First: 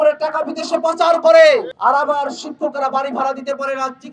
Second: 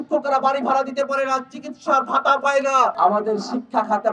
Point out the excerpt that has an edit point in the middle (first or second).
second